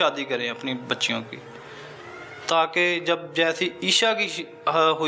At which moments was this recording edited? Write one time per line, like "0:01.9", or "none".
none